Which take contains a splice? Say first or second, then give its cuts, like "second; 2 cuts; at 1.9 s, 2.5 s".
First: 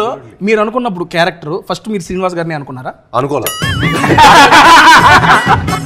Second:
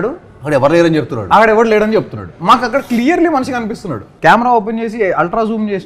second; 1 cut; at 4.0 s